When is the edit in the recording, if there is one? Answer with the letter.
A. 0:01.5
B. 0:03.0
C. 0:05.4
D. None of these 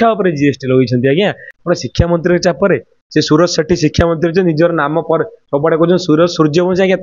A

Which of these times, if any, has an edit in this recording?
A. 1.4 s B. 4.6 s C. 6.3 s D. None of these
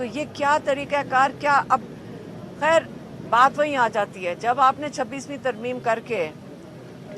A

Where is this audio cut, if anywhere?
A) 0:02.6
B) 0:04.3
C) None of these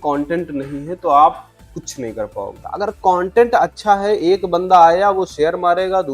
A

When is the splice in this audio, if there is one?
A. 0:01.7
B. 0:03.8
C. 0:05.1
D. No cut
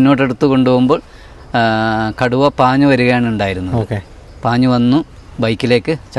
D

